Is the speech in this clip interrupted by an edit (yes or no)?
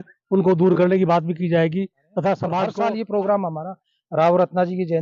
yes